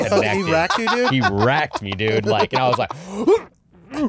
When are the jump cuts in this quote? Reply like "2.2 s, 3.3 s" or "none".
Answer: none